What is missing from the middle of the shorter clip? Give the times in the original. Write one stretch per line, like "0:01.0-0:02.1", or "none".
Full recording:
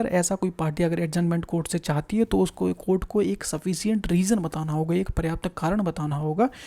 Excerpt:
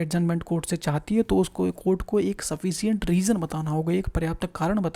none